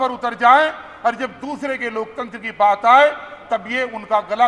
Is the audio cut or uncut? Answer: uncut